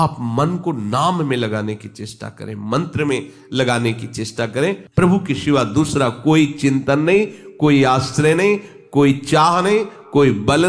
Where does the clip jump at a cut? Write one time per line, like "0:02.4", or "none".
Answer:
0:04.8